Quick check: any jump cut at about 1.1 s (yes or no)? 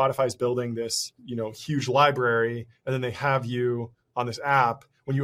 yes